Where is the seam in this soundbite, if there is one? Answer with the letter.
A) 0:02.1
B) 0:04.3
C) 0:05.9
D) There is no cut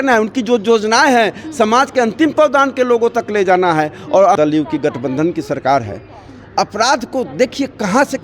B